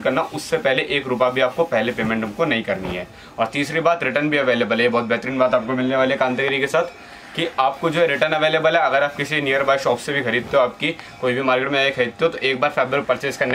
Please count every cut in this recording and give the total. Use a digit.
0